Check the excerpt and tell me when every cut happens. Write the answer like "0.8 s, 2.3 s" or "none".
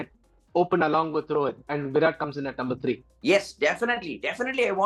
none